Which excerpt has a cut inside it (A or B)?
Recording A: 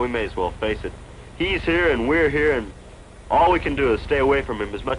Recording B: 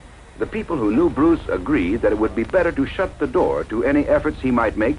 A